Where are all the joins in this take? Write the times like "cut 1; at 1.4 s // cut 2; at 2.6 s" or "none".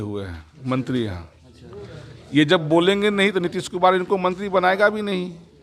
none